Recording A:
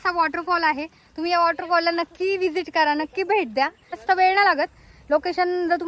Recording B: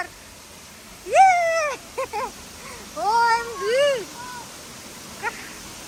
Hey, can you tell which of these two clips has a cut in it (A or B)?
A